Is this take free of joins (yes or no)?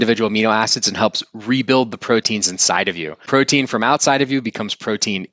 yes